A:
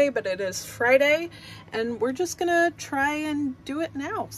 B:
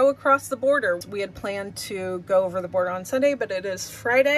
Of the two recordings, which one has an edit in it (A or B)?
B